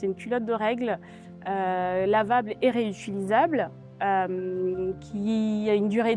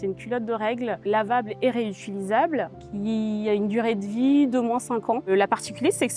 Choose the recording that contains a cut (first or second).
second